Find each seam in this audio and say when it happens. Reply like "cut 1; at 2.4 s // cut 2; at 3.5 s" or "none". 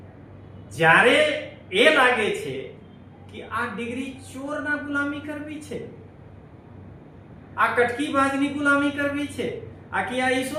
none